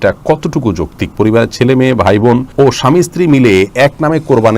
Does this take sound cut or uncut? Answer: cut